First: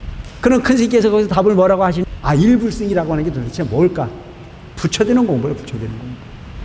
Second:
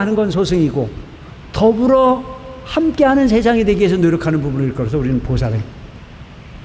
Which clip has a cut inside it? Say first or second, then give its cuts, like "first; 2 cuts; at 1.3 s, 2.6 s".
first; 1 cut; at 2.0 s